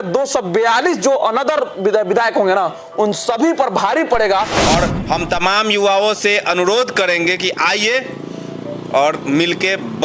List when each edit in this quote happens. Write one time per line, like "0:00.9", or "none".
0:04.6